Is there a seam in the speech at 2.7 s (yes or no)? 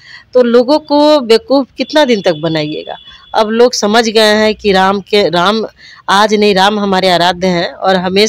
no